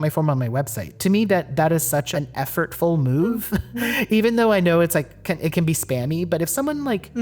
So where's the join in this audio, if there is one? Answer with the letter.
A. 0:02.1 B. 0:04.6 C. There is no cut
A